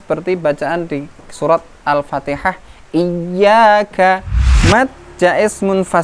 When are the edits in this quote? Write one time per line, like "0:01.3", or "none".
0:04.5